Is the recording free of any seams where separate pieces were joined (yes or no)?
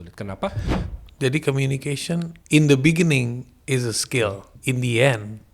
no